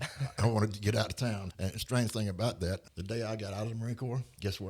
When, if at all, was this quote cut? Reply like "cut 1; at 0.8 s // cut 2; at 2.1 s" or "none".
cut 1; at 1.5 s // cut 2; at 2.9 s